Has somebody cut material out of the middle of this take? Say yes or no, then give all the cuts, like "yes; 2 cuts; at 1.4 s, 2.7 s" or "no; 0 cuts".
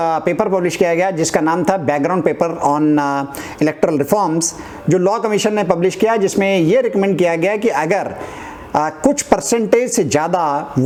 no; 0 cuts